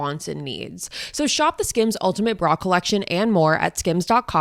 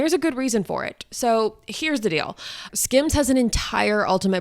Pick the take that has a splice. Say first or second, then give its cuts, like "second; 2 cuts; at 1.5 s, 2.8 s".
second; 1 cut; at 2.6 s